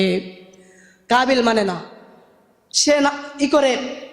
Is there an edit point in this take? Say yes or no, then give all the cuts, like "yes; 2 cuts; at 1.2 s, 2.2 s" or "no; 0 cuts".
no; 0 cuts